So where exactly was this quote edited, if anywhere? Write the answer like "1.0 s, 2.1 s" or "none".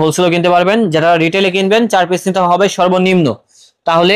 none